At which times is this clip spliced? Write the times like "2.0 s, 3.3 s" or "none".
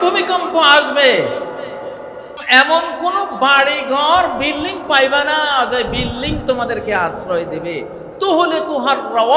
2.3 s